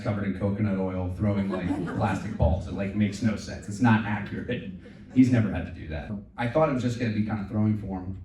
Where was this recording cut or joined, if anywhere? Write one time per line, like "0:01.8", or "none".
0:06.2